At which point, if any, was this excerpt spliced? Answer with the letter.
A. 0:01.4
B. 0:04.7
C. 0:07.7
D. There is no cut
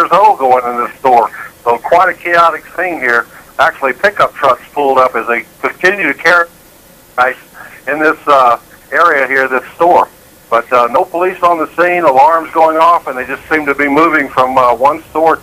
C